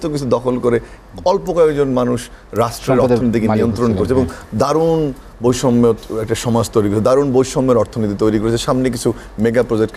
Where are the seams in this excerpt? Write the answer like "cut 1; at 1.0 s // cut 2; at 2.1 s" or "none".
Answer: none